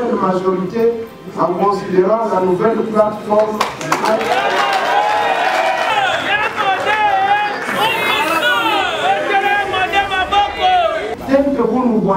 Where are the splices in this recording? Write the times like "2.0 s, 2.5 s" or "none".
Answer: 5.9 s, 11.1 s